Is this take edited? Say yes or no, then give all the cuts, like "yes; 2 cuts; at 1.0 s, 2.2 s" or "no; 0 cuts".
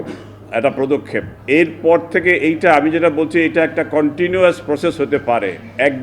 yes; 1 cut; at 1.3 s